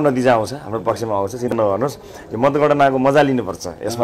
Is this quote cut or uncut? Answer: cut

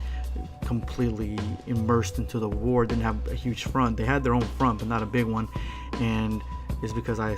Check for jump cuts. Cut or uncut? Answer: cut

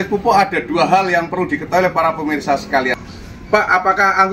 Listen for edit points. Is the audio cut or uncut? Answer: cut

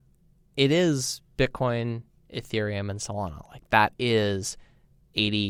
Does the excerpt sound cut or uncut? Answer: uncut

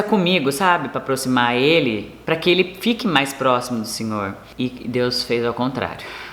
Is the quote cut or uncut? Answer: cut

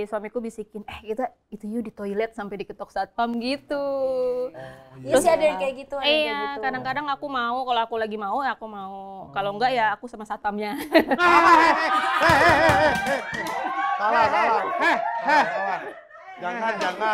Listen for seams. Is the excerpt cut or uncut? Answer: uncut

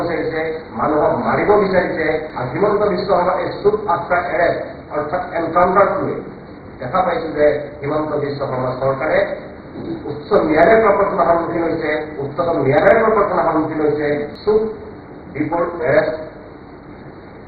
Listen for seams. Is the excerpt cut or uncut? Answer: cut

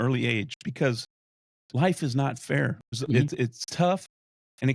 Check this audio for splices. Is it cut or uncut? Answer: cut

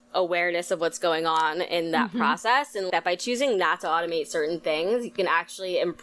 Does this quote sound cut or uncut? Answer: cut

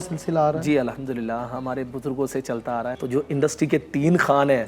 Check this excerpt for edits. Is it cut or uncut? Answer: cut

